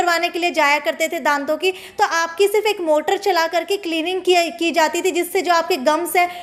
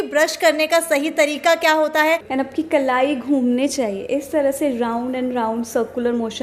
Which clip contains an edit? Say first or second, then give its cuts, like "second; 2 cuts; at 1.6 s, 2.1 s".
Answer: second; 1 cut; at 2.3 s